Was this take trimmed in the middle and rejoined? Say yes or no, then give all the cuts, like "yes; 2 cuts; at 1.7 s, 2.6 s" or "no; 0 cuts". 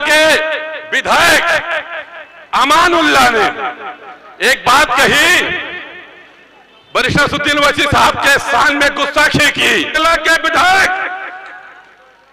yes; 1 cut; at 9.9 s